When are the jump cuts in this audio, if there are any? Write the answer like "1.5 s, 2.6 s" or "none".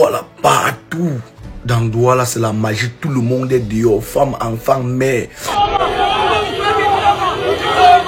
5.5 s